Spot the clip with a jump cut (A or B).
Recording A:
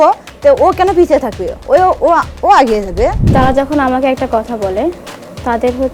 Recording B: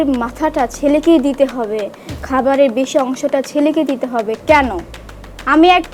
A